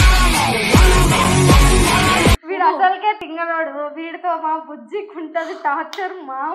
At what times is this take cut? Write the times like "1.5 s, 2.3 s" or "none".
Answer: 2.4 s